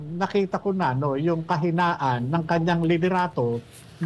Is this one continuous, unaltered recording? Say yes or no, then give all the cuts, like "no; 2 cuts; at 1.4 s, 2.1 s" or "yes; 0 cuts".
yes; 0 cuts